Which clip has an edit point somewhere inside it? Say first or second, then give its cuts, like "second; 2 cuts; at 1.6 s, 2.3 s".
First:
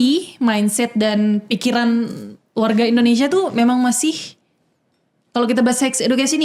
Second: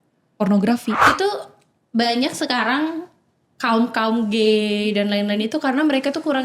second; 1 cut; at 1.1 s